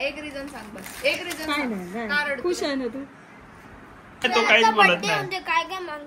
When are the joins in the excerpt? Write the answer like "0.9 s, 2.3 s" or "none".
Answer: 4.3 s